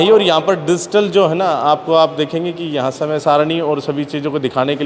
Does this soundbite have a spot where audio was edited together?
no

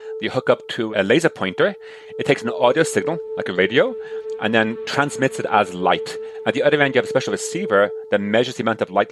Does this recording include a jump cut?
no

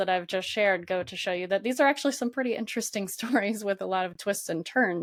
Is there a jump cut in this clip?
no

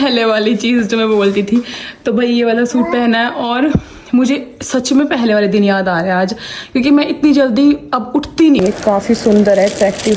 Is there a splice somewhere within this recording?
yes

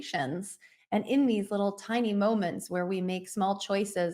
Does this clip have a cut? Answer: no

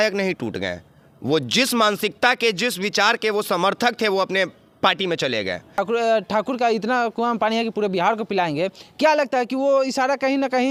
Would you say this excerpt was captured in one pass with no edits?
yes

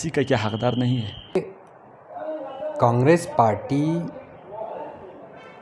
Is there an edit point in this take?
yes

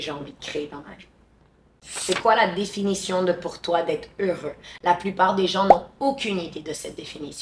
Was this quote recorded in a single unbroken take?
yes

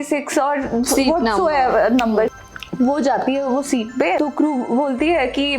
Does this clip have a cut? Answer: yes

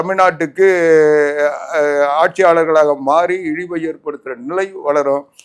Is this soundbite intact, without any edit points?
yes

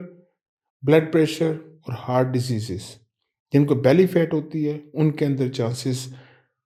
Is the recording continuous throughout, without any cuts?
yes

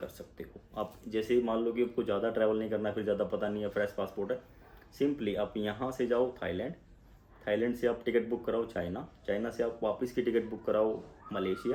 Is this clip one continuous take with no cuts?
yes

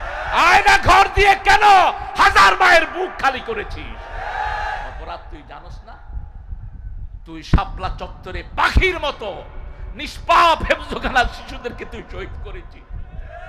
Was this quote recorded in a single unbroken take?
yes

